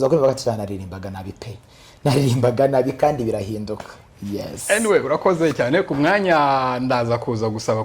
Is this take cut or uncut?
uncut